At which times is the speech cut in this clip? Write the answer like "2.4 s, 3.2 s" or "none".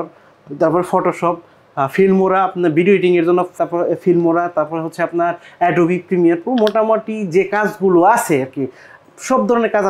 none